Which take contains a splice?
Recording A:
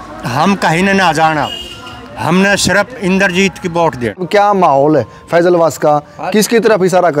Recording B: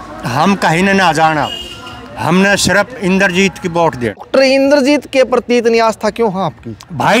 A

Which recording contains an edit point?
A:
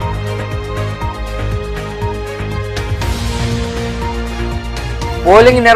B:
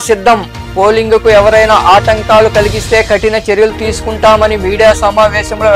A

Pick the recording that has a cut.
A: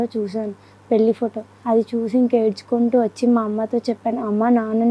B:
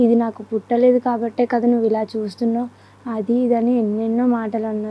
A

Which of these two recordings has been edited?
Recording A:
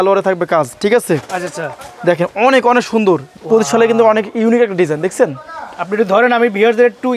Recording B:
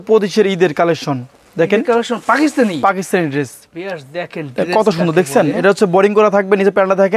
A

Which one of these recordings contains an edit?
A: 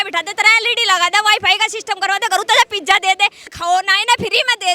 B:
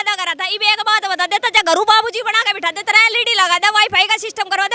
A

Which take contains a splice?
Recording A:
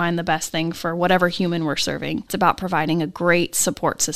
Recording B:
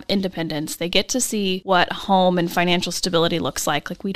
B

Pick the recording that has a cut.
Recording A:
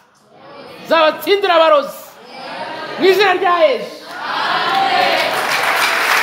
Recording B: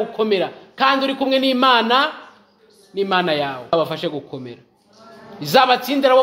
B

